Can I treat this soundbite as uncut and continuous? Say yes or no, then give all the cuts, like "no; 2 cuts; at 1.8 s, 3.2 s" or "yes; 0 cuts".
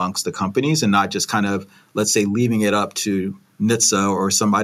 yes; 0 cuts